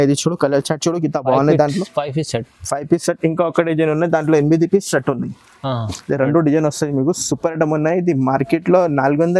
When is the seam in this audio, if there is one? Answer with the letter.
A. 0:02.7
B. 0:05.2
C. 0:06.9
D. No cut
D